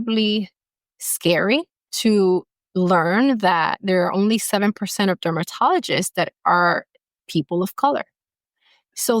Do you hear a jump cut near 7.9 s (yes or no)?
no